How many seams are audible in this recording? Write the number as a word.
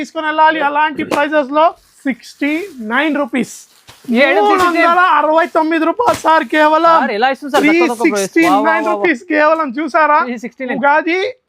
one